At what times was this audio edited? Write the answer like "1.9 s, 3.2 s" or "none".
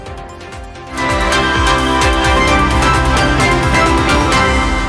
0.9 s